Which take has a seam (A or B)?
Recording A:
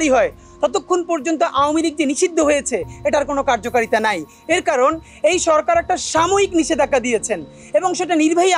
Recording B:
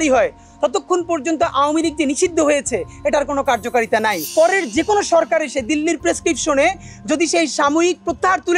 B